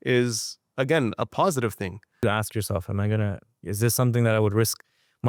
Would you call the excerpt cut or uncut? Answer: cut